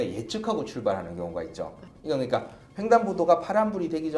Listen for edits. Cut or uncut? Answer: cut